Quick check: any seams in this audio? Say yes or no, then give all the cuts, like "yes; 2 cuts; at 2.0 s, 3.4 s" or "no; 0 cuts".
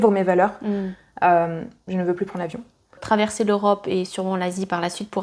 yes; 1 cut; at 3.0 s